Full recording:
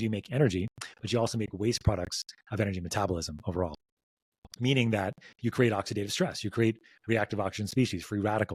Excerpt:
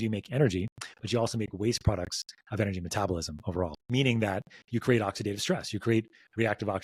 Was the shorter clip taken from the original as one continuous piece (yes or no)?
no